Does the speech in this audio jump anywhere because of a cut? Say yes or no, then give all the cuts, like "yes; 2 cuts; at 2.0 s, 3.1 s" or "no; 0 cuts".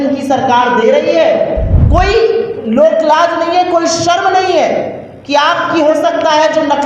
yes; 1 cut; at 1.7 s